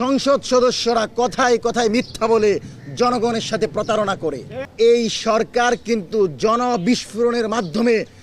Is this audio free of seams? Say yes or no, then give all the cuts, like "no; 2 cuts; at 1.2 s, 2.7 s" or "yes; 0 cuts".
no; 1 cut; at 4.6 s